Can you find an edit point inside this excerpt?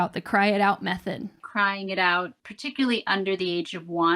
yes; 2 cuts; at 1.4 s, 2.4 s

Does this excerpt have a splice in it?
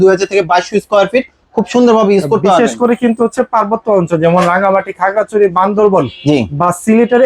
no; 0 cuts

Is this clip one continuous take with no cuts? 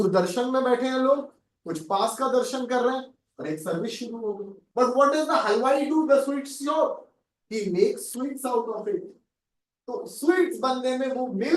no; 1 cut; at 4.6 s

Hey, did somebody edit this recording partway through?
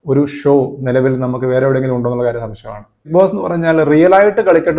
yes; 1 cut; at 3.1 s

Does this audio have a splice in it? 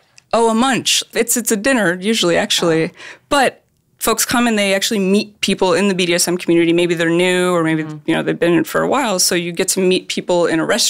yes; 1 cut; at 1.1 s

